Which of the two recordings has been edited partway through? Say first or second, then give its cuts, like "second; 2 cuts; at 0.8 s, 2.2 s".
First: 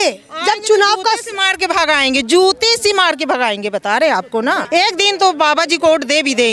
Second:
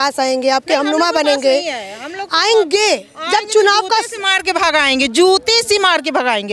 first; 1 cut; at 4.6 s